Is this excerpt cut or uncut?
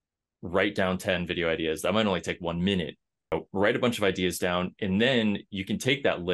cut